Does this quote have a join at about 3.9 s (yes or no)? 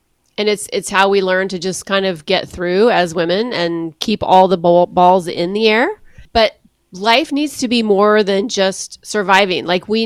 no